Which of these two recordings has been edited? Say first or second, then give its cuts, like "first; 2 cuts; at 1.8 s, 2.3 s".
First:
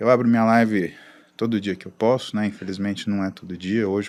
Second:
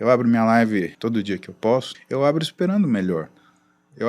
second; 2 cuts; at 0.9 s, 1.9 s